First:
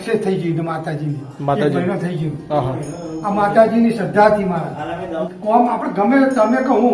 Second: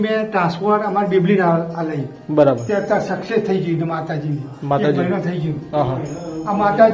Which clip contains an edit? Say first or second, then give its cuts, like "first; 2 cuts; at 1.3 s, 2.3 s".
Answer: first; 1 cut; at 5.2 s